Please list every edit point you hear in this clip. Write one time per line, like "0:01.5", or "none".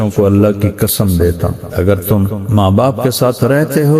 0:01.6